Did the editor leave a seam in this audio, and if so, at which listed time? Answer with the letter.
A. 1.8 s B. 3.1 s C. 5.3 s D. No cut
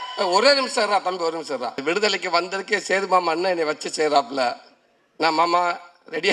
A